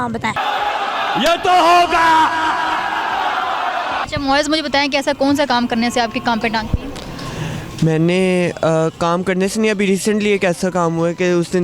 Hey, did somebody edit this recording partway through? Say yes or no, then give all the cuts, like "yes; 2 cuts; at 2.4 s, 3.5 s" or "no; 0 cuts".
no; 0 cuts